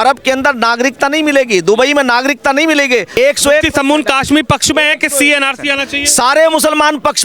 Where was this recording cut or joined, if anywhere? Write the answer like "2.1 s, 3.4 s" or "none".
3.2 s